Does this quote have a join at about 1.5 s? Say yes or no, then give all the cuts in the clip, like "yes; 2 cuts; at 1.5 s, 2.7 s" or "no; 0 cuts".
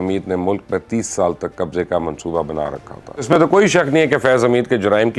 no; 1 cut; at 3.4 s